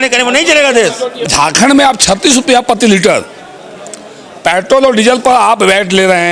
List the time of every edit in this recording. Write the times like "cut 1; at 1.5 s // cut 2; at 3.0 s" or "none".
cut 1; at 1.2 s

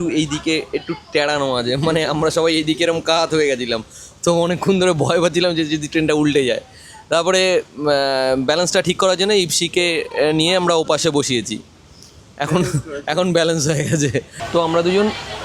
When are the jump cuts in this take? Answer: cut 1; at 14.4 s

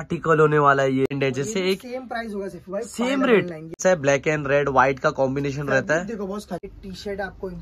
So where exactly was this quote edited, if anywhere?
cut 1; at 1.1 s // cut 2; at 3.8 s // cut 3; at 6.7 s

